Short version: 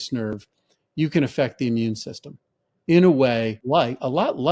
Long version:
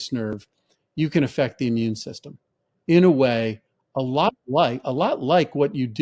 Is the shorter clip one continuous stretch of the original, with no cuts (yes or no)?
no